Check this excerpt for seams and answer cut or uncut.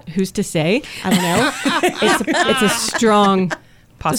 uncut